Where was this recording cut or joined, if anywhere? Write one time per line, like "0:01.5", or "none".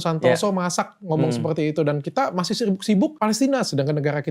0:03.1